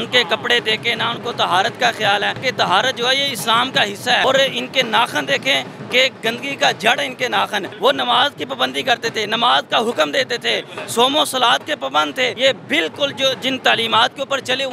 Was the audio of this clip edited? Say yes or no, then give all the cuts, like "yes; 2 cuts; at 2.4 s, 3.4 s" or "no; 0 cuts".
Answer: yes; 4 cuts; at 2.4 s, 4.2 s, 7.7 s, 12.3 s